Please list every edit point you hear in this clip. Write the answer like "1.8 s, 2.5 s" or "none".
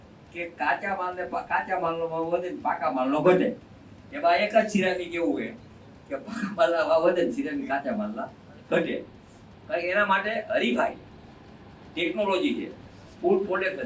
none